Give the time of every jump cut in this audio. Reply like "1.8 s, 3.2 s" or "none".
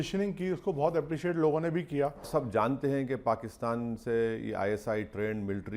2.3 s